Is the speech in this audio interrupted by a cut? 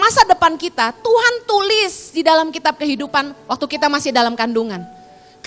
no; 0 cuts

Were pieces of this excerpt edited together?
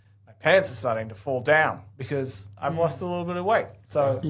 no; 0 cuts

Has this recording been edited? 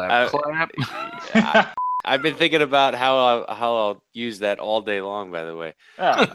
yes; 1 cut; at 1.7 s

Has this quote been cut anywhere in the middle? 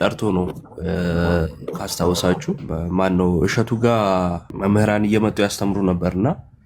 yes; 2 cuts; at 2.6 s, 4.5 s

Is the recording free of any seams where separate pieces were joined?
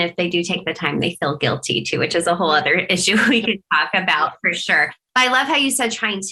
yes; 0 cuts

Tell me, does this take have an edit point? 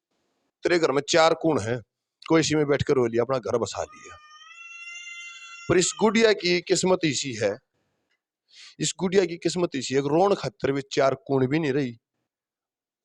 no; 0 cuts

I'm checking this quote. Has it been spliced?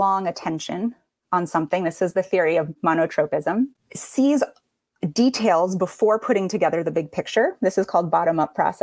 yes; 2 cuts; at 2.8 s, 3.9 s

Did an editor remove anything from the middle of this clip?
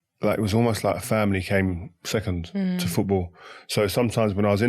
no; 0 cuts

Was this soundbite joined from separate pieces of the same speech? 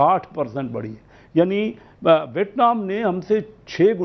no; 0 cuts

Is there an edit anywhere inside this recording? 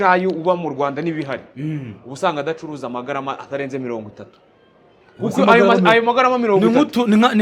no; 0 cuts

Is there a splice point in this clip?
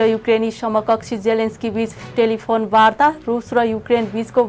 no; 0 cuts

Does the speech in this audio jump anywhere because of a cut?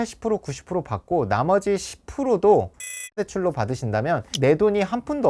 no; 0 cuts

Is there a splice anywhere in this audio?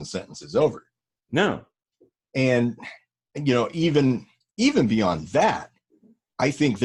no; 0 cuts

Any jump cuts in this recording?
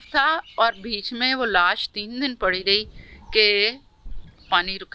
no; 0 cuts

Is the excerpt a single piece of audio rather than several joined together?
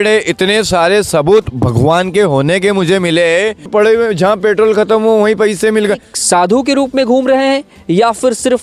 no; 2 cuts; at 3.7 s, 6.1 s

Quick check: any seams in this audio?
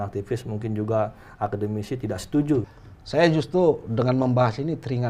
yes; 1 cut; at 2.8 s

